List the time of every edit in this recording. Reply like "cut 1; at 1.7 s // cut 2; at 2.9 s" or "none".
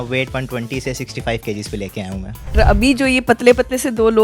cut 1; at 2.5 s